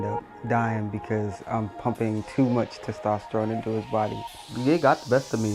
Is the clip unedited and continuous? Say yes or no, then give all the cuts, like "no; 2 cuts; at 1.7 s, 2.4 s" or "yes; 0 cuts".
no; 1 cut; at 4.2 s